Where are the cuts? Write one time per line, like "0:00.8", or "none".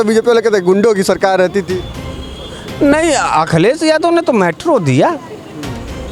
none